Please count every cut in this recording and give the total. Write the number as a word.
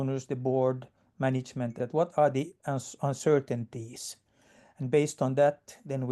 one